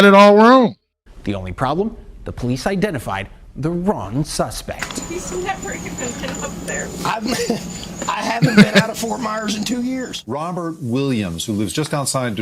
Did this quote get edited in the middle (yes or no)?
yes